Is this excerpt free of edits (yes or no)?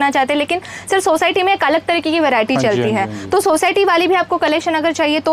yes